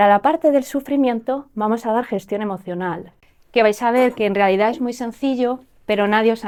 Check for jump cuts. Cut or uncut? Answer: uncut